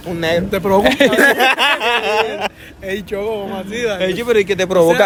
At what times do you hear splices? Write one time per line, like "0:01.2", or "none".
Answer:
none